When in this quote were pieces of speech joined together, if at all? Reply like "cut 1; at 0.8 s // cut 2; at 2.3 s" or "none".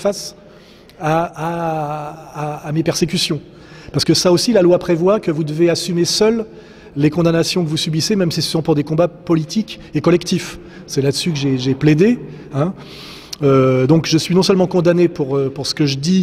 cut 1; at 6.3 s